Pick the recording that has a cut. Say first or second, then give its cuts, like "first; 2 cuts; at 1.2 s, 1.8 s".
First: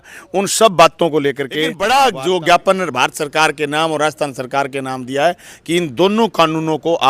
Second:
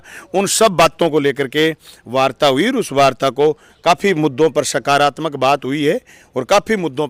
first; 1 cut; at 1.7 s